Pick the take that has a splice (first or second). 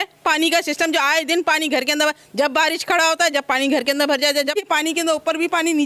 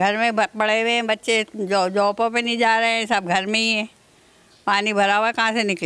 first